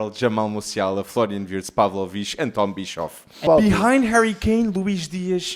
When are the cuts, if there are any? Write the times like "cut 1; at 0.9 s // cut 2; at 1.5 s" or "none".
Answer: cut 1; at 3.4 s